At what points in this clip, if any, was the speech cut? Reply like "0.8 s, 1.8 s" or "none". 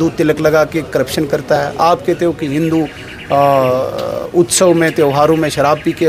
none